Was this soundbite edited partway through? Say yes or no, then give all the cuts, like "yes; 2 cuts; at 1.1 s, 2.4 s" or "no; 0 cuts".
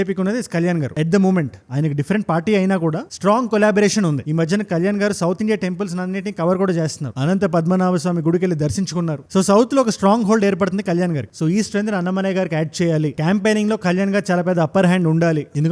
no; 0 cuts